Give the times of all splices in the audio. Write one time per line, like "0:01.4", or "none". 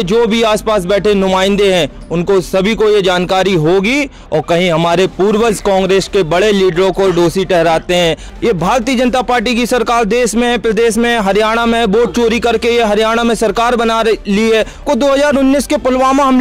0:04.2
0:08.3
0:14.8

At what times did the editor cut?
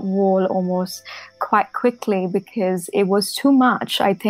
0:01.3

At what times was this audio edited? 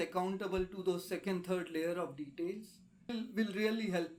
none

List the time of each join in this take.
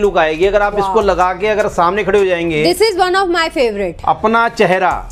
none

